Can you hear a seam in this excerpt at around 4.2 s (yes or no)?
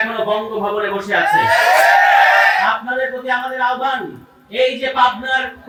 no